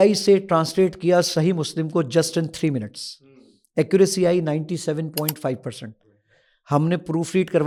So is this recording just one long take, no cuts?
yes; 0 cuts

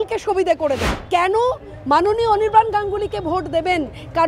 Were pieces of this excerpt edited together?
yes; 1 cut; at 0.9 s

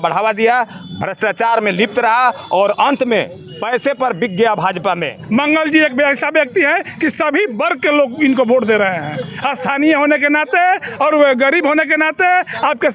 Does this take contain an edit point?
yes; 1 cut; at 5.1 s

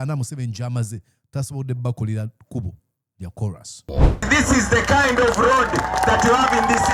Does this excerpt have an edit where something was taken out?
yes; 1 cut; at 4.0 s

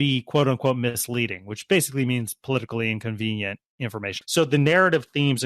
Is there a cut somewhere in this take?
yes; 1 cut; at 4.1 s

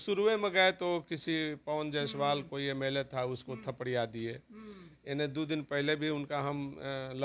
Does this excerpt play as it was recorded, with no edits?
yes; 0 cuts

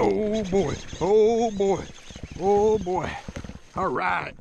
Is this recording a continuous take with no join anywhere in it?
yes; 0 cuts

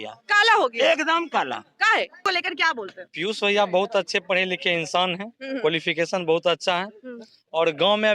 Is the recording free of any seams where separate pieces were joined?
no; 1 cut; at 2.2 s

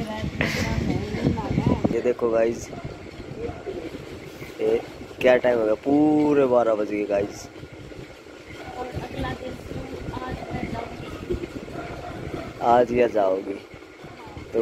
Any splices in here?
yes; 1 cut; at 1.9 s

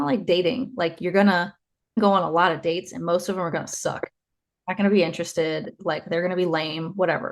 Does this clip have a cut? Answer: yes; 1 cut; at 2.0 s

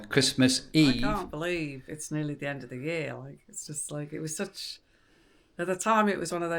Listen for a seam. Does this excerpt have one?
yes; 1 cut; at 1.2 s

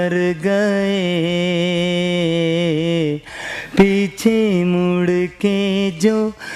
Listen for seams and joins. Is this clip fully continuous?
yes; 0 cuts

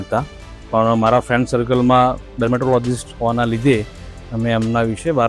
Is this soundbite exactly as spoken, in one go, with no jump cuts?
no; 1 cut; at 2.3 s

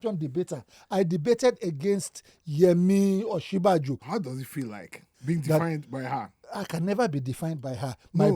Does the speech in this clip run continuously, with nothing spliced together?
no; 3 cuts; at 4.0 s, 5.1 s, 6.4 s

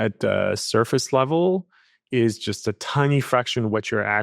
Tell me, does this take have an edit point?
no; 0 cuts

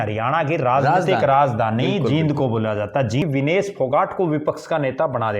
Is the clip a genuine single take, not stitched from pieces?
no; 1 cut; at 3.2 s

